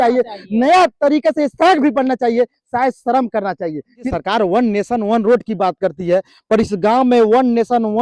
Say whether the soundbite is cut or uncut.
cut